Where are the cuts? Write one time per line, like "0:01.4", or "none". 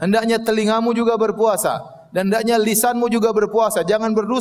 none